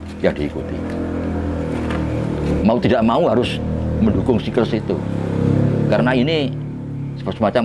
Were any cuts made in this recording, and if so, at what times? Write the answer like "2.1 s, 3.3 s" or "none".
none